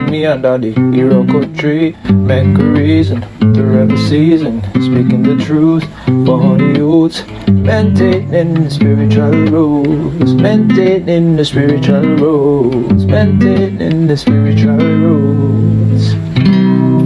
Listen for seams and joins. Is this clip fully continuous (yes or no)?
yes